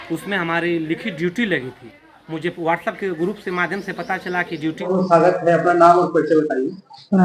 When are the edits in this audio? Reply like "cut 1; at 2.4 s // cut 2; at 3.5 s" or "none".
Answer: cut 1; at 4.8 s